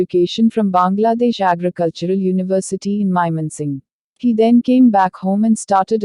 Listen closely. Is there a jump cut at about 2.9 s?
no; 0 cuts

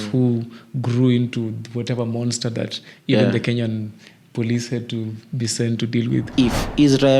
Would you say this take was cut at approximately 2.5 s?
no; 1 cut; at 6.3 s

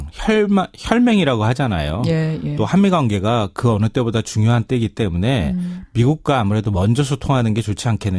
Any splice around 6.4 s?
no; 1 cut; at 1.6 s

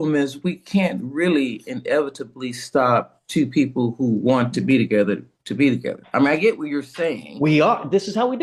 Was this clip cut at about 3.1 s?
no; 0 cuts

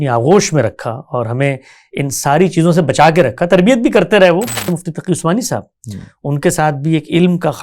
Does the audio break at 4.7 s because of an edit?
yes; 1 cut; at 4.7 s

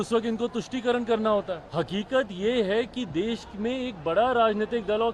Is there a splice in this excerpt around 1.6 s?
yes; 1 cut; at 1.6 s

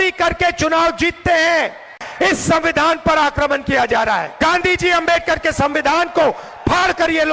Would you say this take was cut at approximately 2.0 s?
yes; 2 cuts; at 2.0 s, 4.3 s

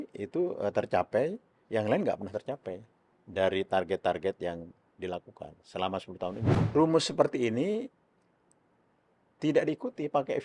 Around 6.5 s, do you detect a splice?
yes; 1 cut; at 6.5 s

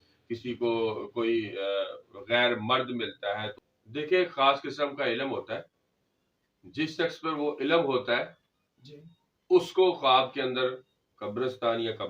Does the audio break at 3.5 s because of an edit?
yes; 1 cut; at 3.5 s

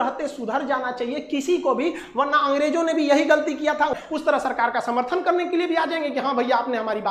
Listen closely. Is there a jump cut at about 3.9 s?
yes; 1 cut; at 3.9 s

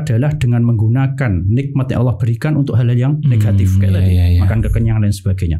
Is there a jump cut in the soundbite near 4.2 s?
no; 0 cuts

